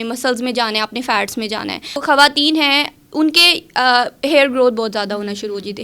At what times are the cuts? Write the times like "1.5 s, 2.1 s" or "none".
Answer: 2.0 s